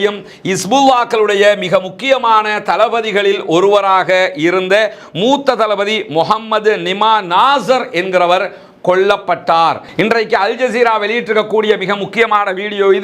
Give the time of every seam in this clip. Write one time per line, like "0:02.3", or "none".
0:09.9